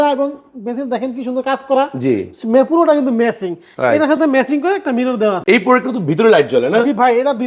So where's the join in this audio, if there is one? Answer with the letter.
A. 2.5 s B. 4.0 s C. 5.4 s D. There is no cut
C